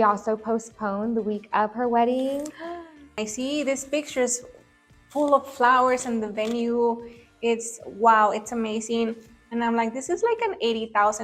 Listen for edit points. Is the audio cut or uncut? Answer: cut